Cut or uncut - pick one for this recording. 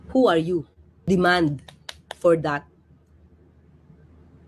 cut